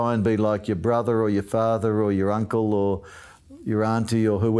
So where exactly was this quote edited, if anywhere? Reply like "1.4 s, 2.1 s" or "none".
none